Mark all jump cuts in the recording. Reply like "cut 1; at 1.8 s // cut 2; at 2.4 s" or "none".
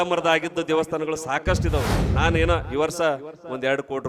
cut 1; at 2.1 s